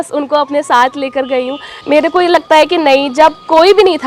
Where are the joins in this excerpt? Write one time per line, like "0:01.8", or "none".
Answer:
0:01.8